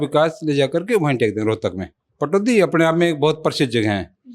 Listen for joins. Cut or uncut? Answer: cut